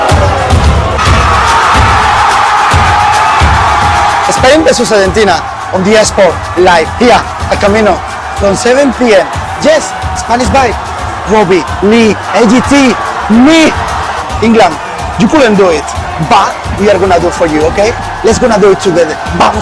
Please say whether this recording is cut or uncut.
uncut